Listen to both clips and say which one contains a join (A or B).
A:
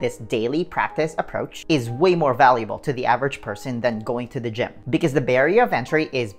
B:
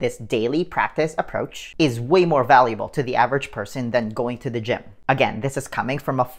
A